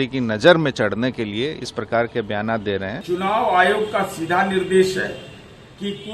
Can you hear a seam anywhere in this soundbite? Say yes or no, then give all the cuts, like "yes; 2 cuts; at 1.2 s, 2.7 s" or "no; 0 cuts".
yes; 1 cut; at 2.9 s